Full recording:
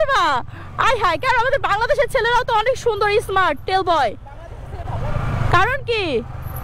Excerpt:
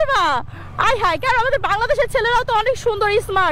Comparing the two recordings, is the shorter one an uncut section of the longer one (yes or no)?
yes